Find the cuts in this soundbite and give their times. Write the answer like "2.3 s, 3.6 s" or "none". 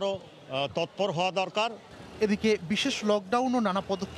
none